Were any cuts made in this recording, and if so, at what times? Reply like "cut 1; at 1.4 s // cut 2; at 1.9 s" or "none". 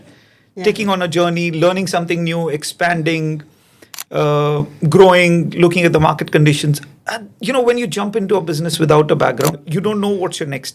cut 1; at 9.6 s